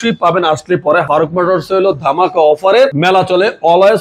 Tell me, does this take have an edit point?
yes; 2 cuts; at 1.0 s, 3.0 s

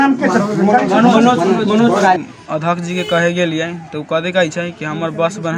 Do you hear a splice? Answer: yes; 1 cut; at 2.3 s

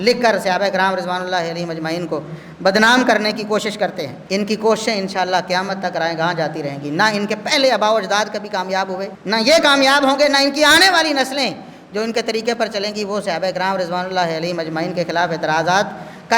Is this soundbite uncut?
no; 2 cuts; at 4.1 s, 9.1 s

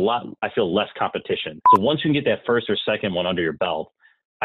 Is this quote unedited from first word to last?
no; 1 cut; at 1.5 s

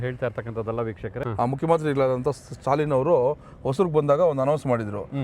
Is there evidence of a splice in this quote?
yes; 1 cut; at 1.1 s

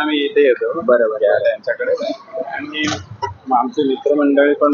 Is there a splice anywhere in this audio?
no; 0 cuts

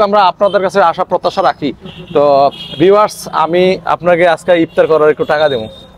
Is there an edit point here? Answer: no; 0 cuts

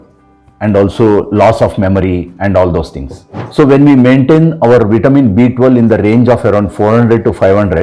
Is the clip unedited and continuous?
no; 1 cut; at 3.4 s

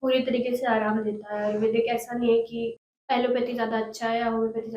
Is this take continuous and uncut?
no; 1 cut; at 2.9 s

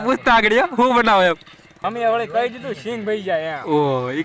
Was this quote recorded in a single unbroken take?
no; 1 cut; at 1.7 s

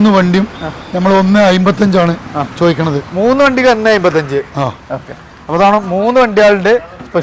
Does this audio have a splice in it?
no; 0 cuts

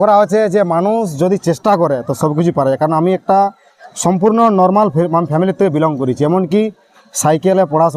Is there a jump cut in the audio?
no; 0 cuts

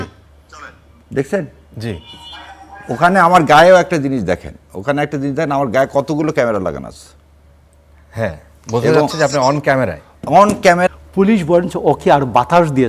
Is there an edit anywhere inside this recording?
yes; 1 cut; at 10.9 s

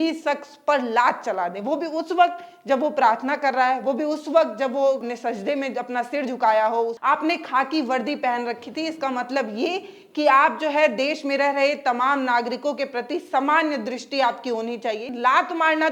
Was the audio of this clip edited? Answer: yes; 3 cuts; at 5.0 s, 7.0 s, 15.1 s

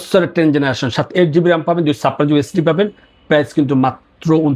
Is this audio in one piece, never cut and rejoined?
yes; 0 cuts

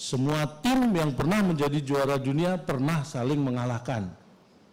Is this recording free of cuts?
yes; 0 cuts

